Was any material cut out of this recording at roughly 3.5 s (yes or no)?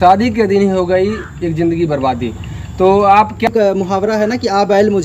yes